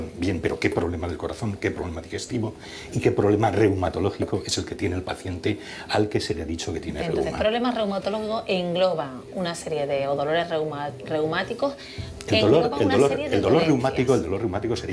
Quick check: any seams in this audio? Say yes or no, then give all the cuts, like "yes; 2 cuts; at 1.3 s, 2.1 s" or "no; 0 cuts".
no; 0 cuts